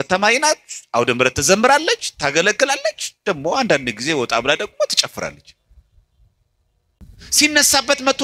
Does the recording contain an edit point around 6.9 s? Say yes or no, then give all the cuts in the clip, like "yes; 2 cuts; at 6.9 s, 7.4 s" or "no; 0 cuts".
yes; 1 cut; at 6.9 s